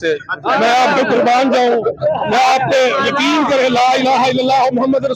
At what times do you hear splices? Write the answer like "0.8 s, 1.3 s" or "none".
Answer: none